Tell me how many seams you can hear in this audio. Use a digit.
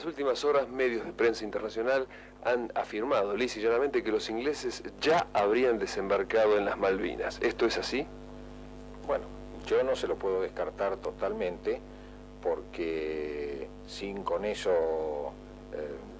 1